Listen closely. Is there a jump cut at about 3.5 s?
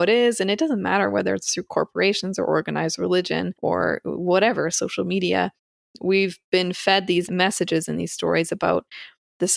yes; 2 cuts; at 3.5 s, 7.3 s

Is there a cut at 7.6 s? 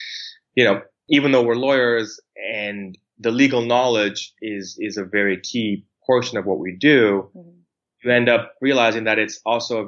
no; 1 cut; at 0.9 s

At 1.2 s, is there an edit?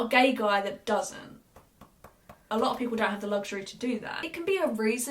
no; 2 cuts; at 2.4 s, 4.2 s

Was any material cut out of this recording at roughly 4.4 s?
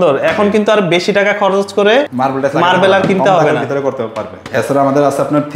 yes; 2 cuts; at 2.1 s, 4.4 s

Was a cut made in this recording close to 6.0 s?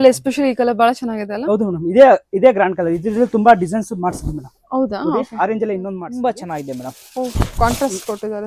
yes; 1 cut; at 6.0 s

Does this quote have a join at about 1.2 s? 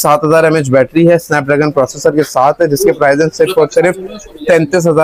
no; 0 cuts

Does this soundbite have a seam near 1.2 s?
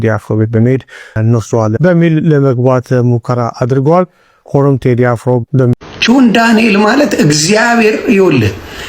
yes; 2 cuts; at 1.2 s, 5.9 s

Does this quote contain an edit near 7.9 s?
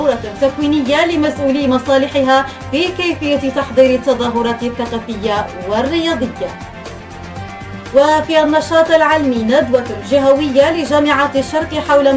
yes; 2 cuts; at 6.5 s, 7.9 s

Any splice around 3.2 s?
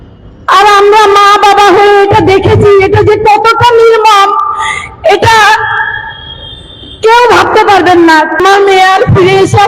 no; 1 cut; at 8.4 s

